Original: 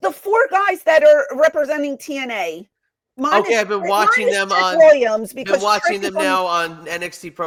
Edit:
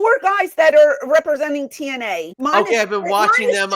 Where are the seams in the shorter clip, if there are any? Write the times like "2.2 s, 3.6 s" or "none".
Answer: 2.3 s

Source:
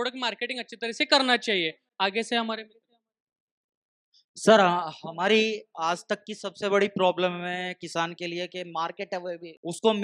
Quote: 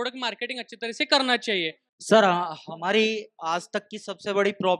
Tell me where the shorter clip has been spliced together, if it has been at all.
1.8 s

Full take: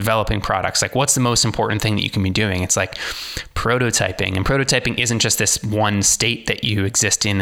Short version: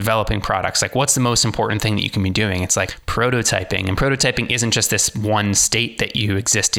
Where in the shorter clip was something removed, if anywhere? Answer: 3.0 s

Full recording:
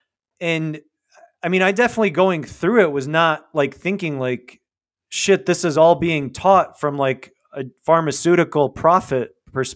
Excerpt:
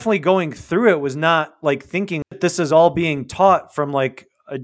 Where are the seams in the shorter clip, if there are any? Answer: 2.3 s

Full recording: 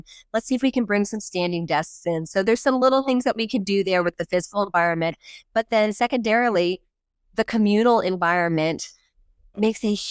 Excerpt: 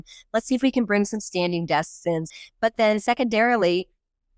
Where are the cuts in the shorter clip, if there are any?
2.3 s

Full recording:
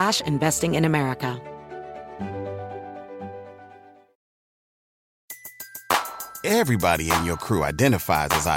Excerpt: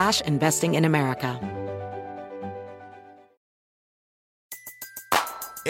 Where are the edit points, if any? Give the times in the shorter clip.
1.4 s

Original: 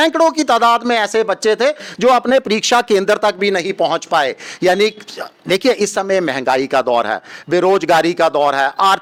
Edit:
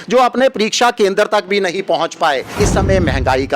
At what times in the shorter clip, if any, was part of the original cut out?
2.6 s

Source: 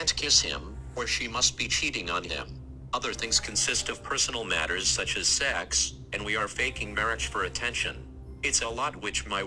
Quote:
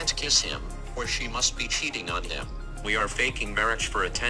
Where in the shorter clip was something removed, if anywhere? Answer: 2.8 s

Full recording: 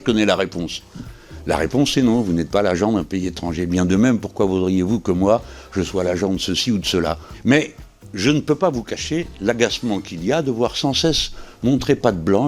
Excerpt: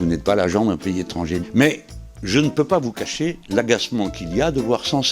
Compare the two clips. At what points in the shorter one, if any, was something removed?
1.4 s

